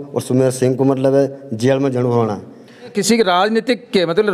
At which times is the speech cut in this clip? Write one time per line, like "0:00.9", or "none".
0:02.9